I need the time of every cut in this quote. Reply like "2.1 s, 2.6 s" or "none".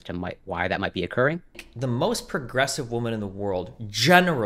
1.6 s